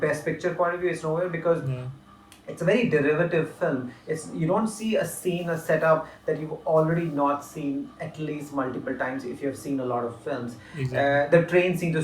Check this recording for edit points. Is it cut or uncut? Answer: uncut